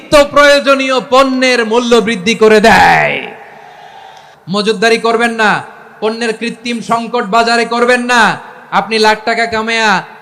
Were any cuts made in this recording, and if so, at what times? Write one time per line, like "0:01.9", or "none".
0:04.3